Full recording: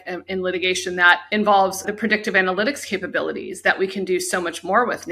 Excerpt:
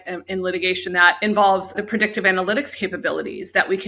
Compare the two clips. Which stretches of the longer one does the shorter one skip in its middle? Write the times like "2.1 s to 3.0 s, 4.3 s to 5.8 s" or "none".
1.1 s to 1.2 s

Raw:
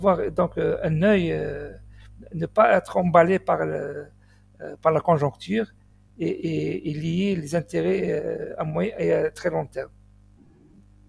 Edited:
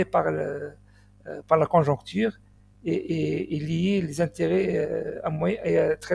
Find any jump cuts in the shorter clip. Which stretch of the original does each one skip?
none

